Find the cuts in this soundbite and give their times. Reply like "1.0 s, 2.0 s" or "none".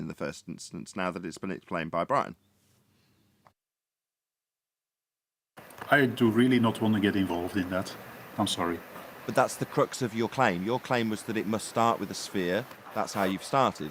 none